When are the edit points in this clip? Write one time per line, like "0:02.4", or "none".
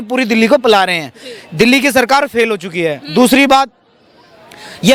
none